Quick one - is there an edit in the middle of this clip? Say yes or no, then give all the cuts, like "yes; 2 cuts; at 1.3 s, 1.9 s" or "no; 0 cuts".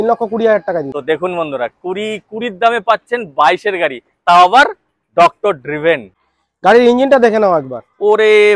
yes; 2 cuts; at 0.9 s, 6.3 s